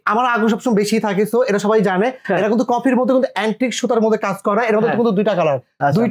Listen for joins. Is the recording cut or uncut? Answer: uncut